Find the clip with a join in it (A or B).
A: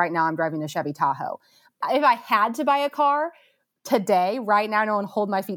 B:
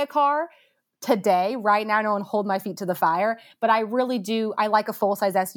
A